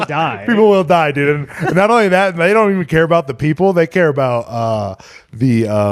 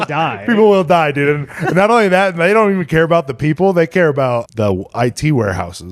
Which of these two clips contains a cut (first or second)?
second